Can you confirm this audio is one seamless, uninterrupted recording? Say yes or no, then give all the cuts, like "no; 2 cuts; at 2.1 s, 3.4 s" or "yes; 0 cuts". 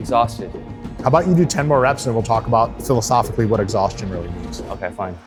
yes; 0 cuts